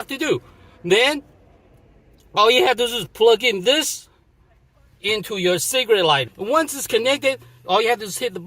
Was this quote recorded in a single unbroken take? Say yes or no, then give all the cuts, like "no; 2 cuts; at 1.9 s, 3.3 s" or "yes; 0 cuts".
no; 1 cut; at 6.3 s